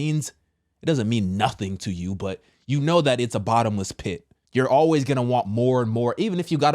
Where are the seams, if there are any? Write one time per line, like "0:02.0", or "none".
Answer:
0:04.3

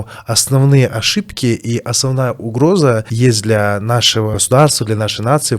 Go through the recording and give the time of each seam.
0:03.1
0:04.4

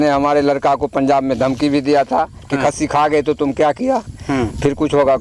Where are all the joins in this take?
none

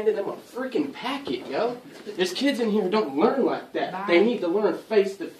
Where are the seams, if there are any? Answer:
none

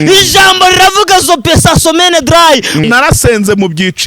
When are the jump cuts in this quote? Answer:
0:02.8

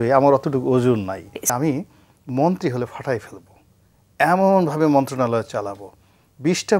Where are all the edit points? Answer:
0:01.5

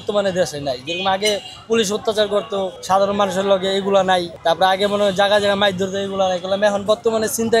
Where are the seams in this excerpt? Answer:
0:02.8
0:04.3

